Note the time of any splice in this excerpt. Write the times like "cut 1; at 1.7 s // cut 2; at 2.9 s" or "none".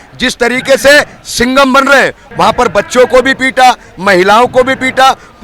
cut 1; at 2.2 s